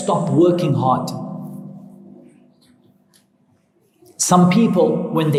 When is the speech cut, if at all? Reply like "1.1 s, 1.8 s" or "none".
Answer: none